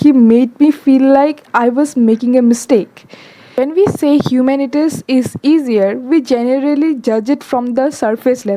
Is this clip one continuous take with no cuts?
no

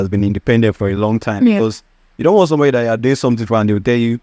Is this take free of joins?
yes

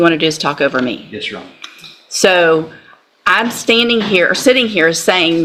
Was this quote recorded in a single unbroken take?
yes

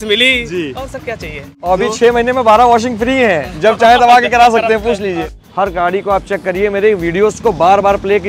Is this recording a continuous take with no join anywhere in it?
no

